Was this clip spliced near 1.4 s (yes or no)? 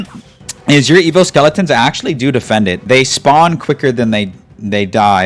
no